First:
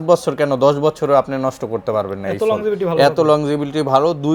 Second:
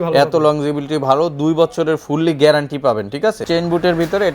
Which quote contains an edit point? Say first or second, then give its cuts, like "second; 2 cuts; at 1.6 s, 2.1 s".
second; 1 cut; at 3.4 s